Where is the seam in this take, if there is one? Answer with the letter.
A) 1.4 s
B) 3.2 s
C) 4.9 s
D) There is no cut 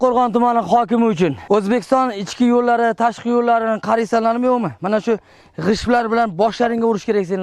A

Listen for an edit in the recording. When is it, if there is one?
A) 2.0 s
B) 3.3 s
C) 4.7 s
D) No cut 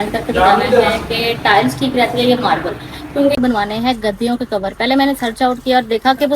B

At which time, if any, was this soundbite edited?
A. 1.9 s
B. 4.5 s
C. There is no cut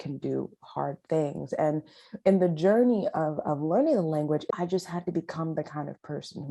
B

